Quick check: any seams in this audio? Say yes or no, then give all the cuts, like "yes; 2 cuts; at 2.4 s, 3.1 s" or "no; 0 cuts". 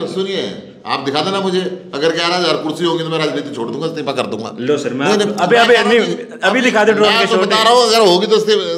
no; 0 cuts